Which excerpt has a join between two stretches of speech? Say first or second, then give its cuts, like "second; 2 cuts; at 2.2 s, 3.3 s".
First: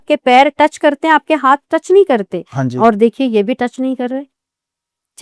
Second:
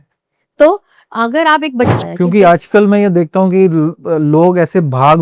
second; 1 cut; at 1.9 s